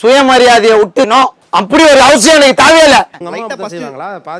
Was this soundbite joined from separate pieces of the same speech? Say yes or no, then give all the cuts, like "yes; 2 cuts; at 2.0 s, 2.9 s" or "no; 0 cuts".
no; 0 cuts